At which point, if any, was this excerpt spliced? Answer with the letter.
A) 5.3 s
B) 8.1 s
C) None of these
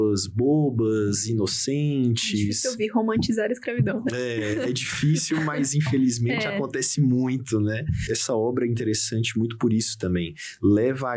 B